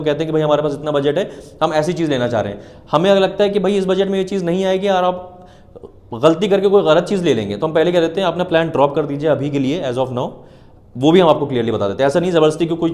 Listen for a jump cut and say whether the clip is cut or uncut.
uncut